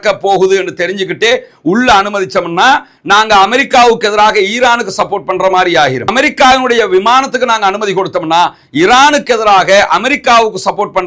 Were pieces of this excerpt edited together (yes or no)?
no